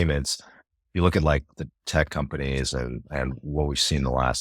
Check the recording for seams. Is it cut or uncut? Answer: uncut